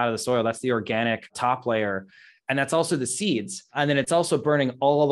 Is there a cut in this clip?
no; 0 cuts

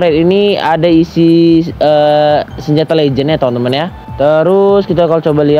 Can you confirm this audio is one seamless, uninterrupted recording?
no; 1 cut; at 4.0 s

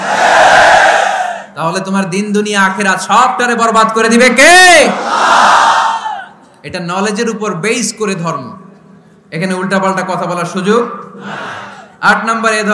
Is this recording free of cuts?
yes; 0 cuts

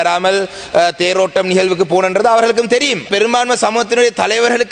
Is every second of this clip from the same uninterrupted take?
no; 1 cut; at 3.1 s

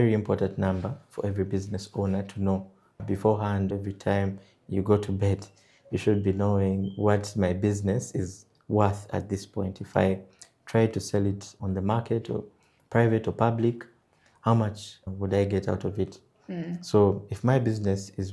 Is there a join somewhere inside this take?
no; 0 cuts

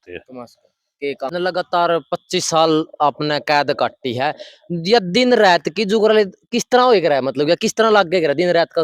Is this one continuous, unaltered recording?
no; 1 cut; at 1.3 s

